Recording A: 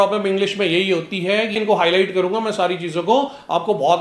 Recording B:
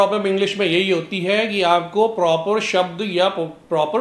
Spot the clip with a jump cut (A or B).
A